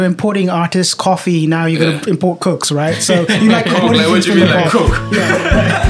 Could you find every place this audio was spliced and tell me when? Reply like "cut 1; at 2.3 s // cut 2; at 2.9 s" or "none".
none